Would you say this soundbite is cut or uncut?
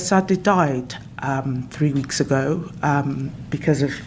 uncut